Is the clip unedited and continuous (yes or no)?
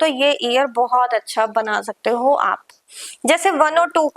yes